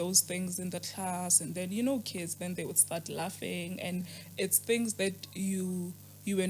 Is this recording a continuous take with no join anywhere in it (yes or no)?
yes